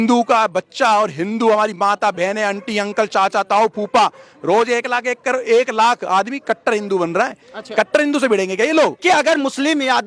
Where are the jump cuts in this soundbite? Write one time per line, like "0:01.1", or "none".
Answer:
0:09.0